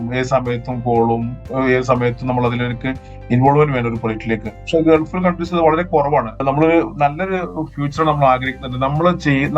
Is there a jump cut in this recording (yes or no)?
yes